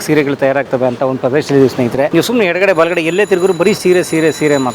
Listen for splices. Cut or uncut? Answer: cut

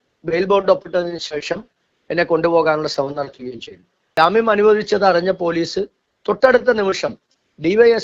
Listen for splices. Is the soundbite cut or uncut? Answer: cut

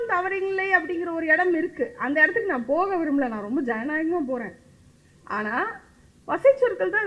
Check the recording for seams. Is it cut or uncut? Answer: uncut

